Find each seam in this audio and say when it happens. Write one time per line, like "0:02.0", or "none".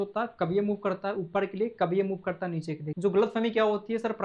0:02.8